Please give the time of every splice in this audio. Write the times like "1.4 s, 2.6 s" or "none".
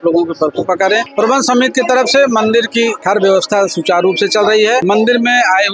1.1 s, 3.0 s, 4.8 s